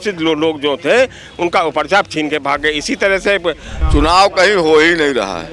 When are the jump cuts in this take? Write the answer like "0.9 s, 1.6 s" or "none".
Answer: 3.7 s